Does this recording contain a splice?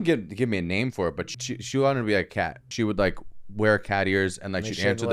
yes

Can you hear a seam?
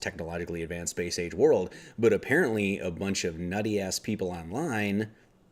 yes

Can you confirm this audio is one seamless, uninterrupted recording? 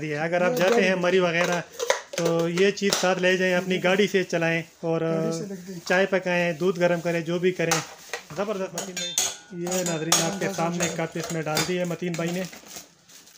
no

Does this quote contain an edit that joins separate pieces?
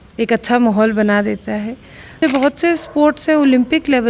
yes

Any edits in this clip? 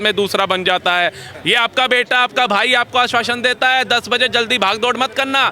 yes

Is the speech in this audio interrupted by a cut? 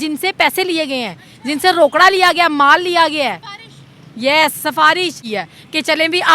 yes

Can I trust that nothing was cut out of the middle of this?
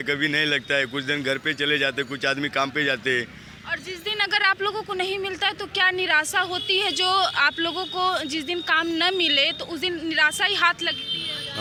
yes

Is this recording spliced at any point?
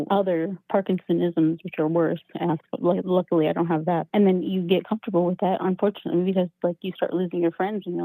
no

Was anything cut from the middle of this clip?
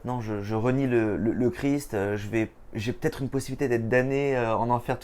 no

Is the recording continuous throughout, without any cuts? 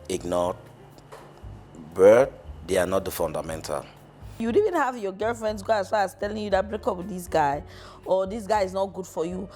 no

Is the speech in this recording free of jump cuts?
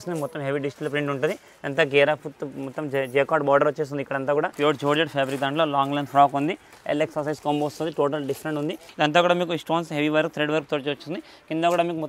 no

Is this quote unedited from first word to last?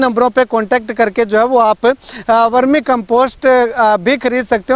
yes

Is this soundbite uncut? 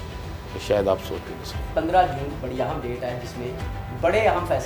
no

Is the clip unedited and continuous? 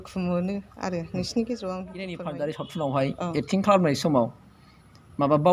no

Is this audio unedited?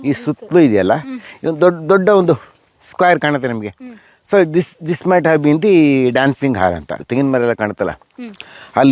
no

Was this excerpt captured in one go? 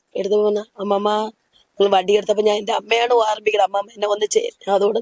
yes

